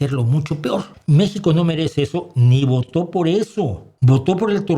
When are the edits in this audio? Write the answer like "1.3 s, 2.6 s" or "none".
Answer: 0.9 s, 3.9 s